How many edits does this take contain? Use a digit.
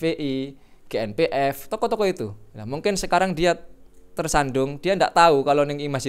0